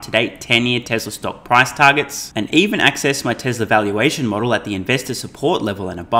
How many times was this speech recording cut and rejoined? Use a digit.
0